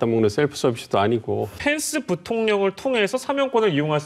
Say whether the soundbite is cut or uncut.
cut